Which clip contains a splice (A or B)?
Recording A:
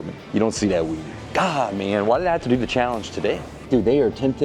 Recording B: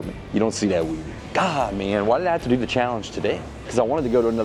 A